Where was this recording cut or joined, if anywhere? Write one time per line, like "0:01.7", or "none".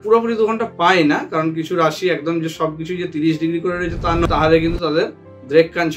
0:04.2